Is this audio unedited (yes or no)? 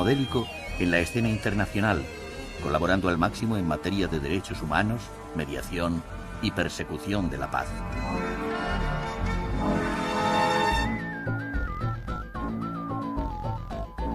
yes